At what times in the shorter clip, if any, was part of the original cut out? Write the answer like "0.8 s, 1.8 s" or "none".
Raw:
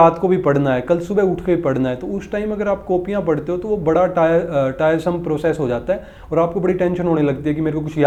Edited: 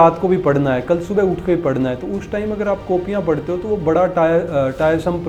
none

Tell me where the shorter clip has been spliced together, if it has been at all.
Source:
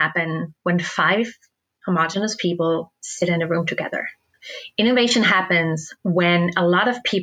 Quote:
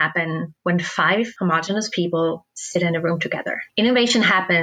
1.3 s, 3.6 s

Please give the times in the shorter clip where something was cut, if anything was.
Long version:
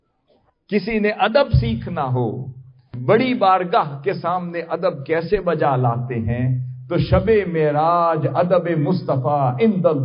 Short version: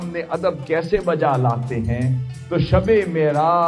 none

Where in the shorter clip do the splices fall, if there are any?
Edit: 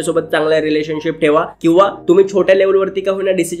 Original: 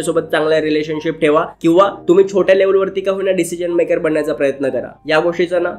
none

